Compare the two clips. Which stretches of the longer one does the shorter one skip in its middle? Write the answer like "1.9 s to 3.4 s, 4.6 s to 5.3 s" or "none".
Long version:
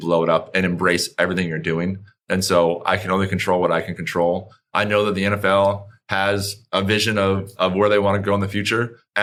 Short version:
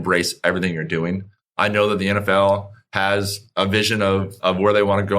2.1 s to 4.5 s